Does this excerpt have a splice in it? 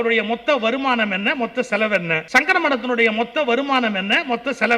yes; 1 cut; at 2.2 s

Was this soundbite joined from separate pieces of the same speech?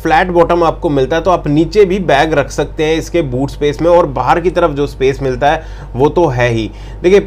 no; 0 cuts

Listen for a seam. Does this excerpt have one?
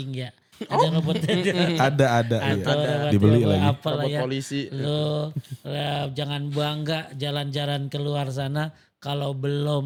no; 0 cuts

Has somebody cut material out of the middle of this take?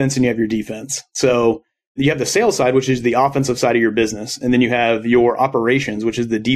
no; 0 cuts

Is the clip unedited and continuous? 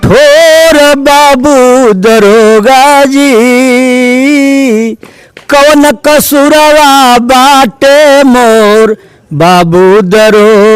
yes; 0 cuts

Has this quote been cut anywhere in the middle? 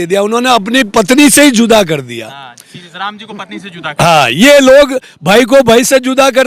no; 0 cuts

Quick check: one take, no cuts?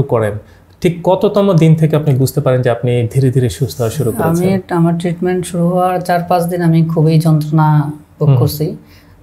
yes; 0 cuts

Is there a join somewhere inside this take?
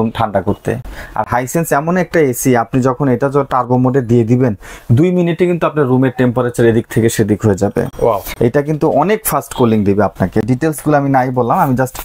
no; 0 cuts

